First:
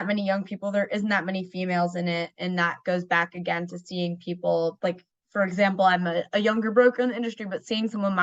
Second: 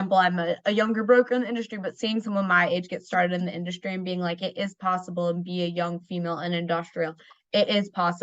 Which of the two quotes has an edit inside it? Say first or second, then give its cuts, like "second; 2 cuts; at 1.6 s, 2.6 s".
first; 1 cut; at 4.8 s